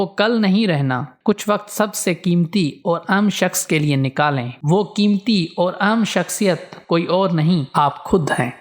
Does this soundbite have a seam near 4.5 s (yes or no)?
yes